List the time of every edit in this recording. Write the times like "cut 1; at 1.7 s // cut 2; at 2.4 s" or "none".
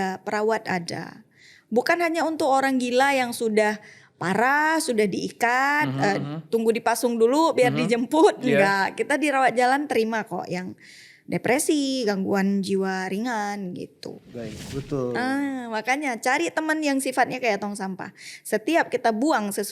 cut 1; at 14.7 s